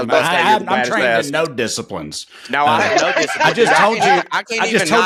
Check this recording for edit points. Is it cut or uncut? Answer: uncut